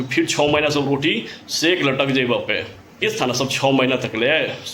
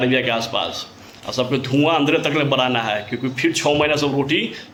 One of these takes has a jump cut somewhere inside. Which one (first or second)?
first